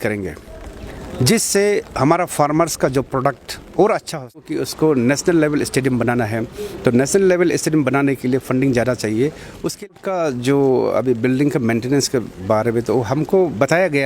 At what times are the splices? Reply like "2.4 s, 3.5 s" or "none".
4.6 s, 9.8 s